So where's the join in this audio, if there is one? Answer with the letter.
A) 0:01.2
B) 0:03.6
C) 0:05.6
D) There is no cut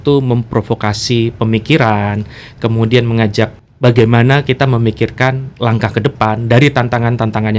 B